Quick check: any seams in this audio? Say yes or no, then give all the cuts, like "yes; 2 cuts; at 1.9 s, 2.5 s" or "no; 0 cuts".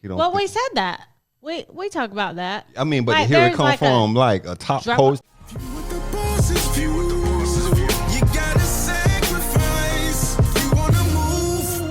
yes; 1 cut; at 5.2 s